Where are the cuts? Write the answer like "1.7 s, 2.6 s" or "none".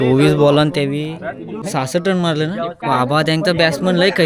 1.5 s, 2.8 s